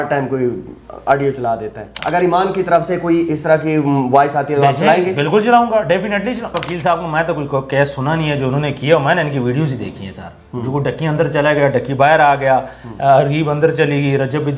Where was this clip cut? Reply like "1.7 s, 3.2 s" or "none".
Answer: 1.9 s, 6.5 s